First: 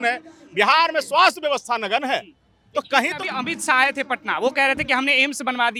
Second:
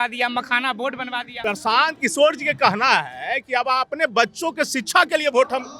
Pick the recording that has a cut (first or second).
second